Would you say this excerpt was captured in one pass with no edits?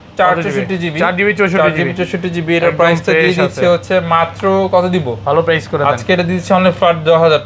yes; 0 cuts

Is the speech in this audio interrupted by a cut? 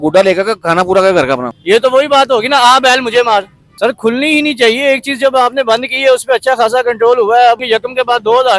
yes; 3 cuts; at 1.5 s, 3.6 s, 7.6 s

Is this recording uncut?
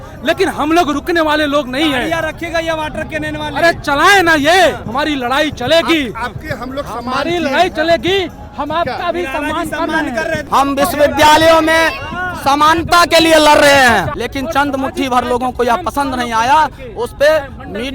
no; 3 cuts; at 4.9 s, 10.4 s, 14.2 s

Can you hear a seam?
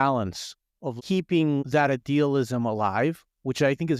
yes; 1 cut; at 1.0 s

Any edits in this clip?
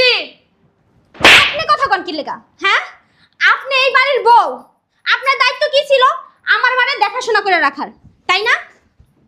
no; 0 cuts

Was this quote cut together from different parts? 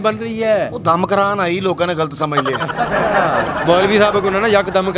no; 0 cuts

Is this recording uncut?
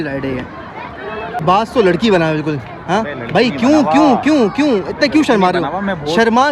yes; 0 cuts

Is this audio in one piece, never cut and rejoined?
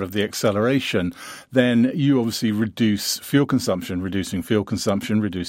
yes; 0 cuts

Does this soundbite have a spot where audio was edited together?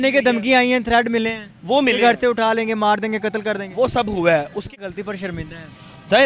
yes; 1 cut; at 4.7 s

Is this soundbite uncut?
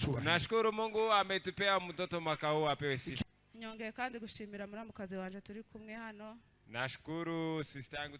no; 1 cut; at 3.2 s

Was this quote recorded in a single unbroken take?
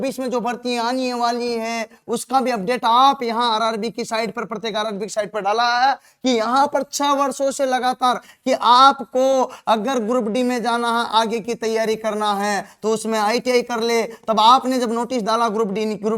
yes; 0 cuts

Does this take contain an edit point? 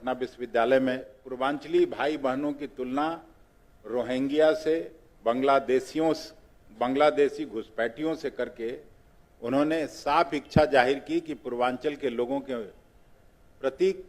yes; 1 cut; at 1.2 s

